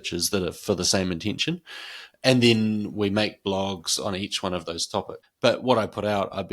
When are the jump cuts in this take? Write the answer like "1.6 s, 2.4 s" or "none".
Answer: 5.2 s